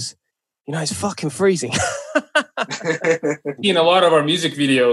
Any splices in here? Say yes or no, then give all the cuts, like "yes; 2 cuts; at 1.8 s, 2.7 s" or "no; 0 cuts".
yes; 1 cut; at 3.6 s